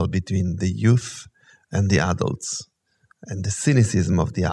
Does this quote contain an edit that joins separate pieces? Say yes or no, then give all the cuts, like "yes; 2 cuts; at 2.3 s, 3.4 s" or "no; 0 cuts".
no; 0 cuts